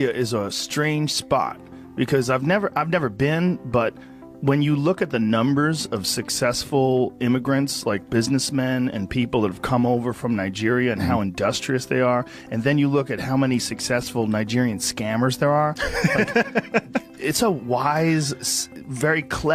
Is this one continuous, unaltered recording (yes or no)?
yes